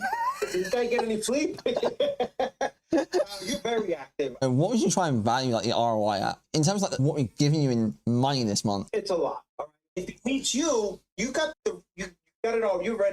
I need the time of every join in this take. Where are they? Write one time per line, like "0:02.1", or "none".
0:04.3
0:08.9
0:10.0